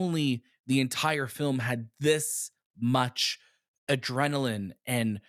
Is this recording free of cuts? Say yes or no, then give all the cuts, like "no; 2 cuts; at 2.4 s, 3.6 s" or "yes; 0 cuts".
yes; 0 cuts